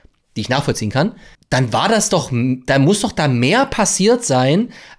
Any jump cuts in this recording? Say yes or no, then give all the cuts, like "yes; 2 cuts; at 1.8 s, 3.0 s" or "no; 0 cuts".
yes; 1 cut; at 1.3 s